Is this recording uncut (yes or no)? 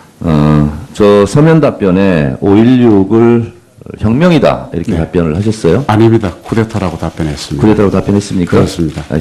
yes